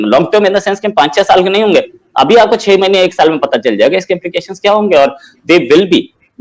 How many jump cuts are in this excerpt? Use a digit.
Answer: 0